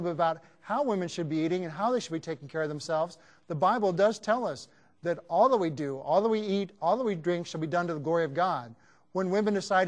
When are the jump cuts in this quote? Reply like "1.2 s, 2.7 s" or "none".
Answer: none